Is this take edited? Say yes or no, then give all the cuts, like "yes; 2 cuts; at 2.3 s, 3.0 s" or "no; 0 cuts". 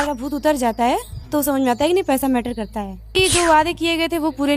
yes; 1 cut; at 3.1 s